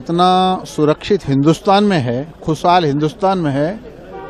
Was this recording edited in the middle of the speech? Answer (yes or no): no